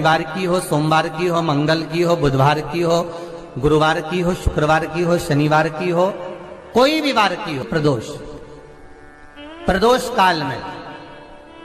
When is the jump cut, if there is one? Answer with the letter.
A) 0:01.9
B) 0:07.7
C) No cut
B